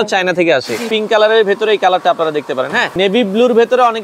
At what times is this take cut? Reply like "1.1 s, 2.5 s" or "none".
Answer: 0.8 s, 2.9 s

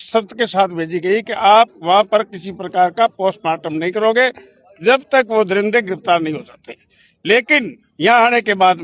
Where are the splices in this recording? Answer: none

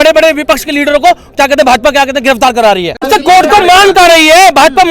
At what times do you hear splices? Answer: 3.1 s

